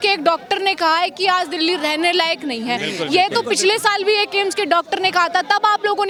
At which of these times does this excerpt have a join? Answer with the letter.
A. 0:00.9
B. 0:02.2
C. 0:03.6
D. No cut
D